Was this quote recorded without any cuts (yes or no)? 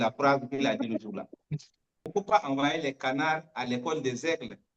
no